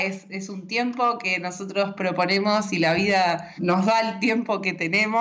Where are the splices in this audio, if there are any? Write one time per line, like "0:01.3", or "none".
0:03.5